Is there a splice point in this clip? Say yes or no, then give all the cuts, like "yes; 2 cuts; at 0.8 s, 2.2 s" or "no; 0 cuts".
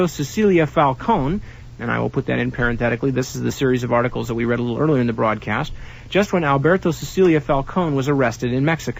no; 0 cuts